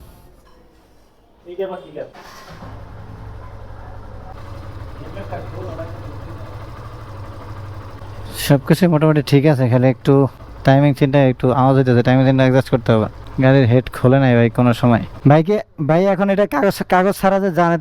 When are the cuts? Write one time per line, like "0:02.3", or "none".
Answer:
none

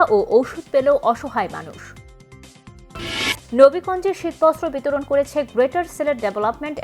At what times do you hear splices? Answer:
0:03.4

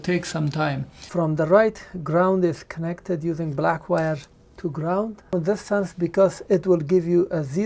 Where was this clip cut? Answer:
0:01.0
0:05.3

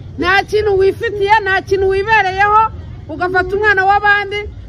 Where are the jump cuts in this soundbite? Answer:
none

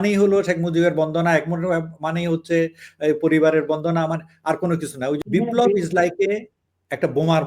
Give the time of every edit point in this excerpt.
0:05.2

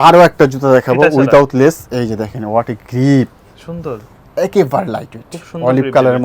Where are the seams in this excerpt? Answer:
none

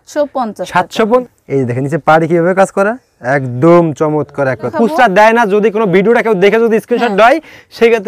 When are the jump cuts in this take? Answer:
0:01.2
0:04.7

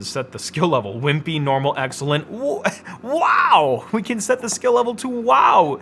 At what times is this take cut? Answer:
none

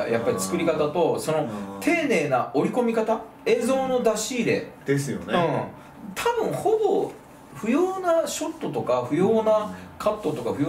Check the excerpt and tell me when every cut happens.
none

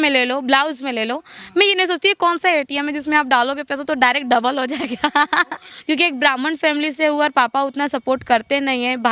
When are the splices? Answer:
0:05.7

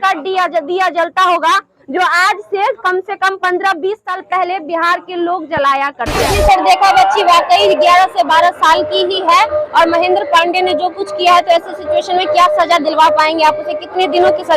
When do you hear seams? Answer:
0:06.3

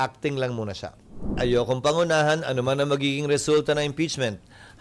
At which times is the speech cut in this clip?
0:01.4

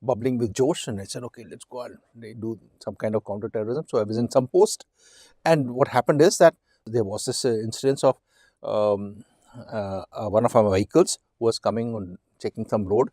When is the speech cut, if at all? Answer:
0:06.8

